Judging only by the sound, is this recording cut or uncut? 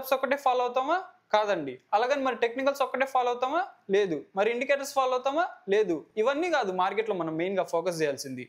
uncut